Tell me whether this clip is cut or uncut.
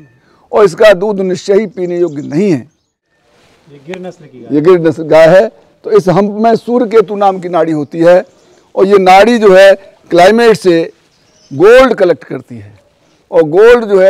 cut